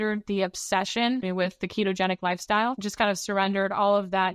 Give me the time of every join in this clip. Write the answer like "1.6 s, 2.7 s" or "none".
1.2 s, 2.8 s